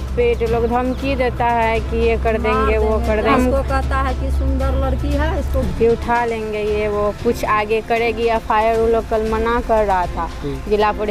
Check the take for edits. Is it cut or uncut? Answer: uncut